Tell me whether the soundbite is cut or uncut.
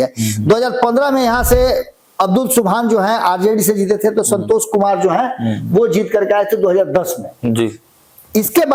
uncut